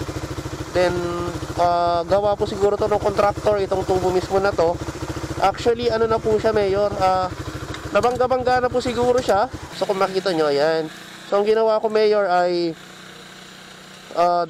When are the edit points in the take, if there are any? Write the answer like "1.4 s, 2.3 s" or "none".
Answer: none